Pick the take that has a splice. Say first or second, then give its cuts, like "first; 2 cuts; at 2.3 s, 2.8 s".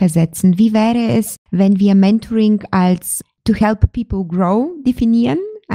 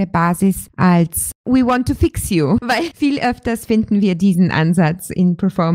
second; 1 cut; at 1.4 s